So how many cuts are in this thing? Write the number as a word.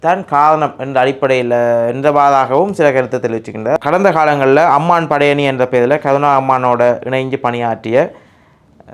one